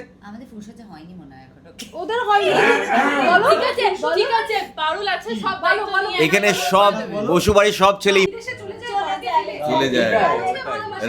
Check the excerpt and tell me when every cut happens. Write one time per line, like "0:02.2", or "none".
0:08.3